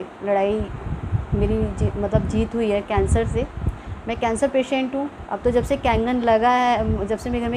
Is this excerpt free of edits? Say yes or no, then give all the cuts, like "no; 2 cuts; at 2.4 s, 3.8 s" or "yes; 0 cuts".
no; 1 cut; at 5.2 s